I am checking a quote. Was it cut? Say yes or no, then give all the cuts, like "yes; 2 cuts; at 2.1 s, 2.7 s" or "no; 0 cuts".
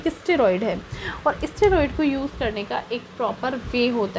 no; 0 cuts